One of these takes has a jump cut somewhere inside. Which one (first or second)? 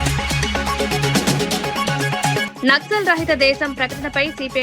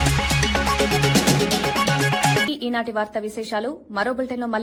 first